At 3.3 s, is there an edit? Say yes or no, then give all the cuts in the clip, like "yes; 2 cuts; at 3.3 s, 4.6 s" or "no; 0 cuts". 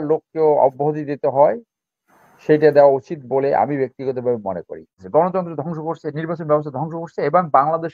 no; 1 cut; at 5.0 s